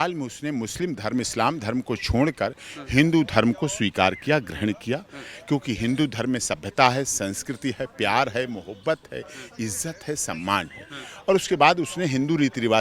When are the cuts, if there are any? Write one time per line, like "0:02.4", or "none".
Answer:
none

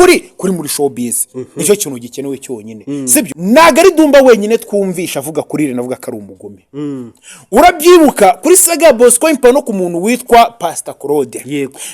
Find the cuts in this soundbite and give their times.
0:03.4

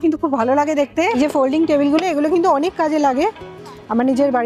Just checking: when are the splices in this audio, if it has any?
0:01.1

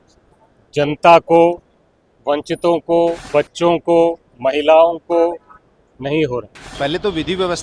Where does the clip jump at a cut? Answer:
0:03.2
0:06.6

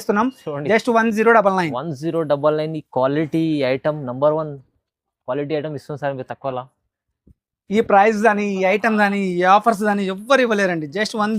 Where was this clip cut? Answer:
none

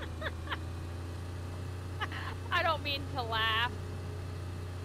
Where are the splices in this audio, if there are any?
none

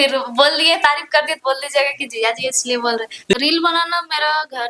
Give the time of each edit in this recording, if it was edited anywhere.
0:03.3

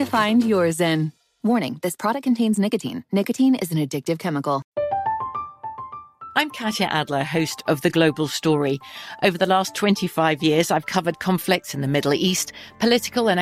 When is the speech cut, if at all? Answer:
0:04.7

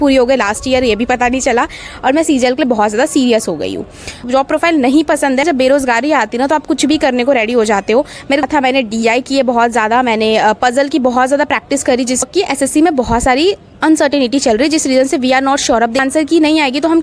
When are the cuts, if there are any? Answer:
0:04.3
0:05.4
0:08.4
0:12.2
0:16.0

